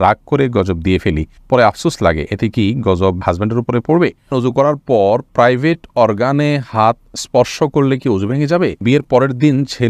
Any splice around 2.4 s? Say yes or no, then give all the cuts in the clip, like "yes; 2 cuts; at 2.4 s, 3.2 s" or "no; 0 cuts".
no; 2 cuts; at 4.3 s, 8.8 s